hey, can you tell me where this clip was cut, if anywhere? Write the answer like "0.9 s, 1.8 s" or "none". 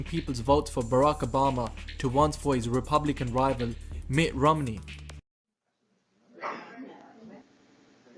4.0 s